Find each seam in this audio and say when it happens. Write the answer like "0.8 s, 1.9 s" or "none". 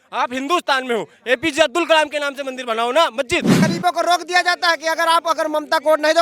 3.6 s